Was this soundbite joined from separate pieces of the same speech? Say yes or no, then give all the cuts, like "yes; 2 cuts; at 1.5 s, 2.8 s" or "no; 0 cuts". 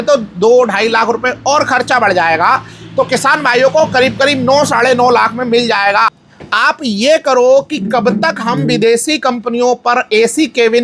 yes; 1 cut; at 6.1 s